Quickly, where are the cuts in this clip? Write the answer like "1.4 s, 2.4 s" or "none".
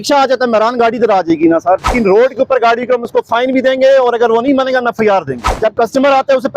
1.9 s, 5.4 s